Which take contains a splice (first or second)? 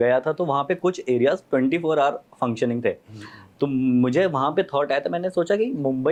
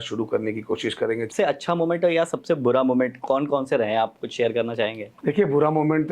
second